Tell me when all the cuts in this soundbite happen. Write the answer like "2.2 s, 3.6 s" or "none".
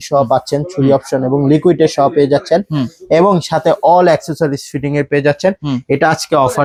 none